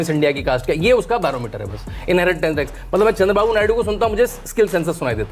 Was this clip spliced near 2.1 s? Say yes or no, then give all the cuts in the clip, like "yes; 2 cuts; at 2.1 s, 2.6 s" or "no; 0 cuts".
no; 0 cuts